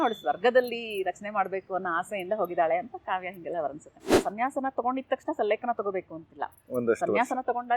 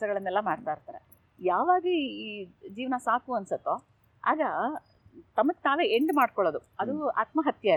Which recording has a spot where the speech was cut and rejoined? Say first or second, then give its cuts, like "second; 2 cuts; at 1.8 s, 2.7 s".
first; 1 cut; at 4.2 s